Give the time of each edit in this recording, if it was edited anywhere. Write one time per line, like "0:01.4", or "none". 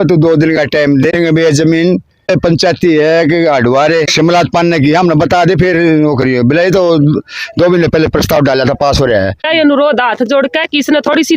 0:01.1
0:02.3
0:04.1
0:09.4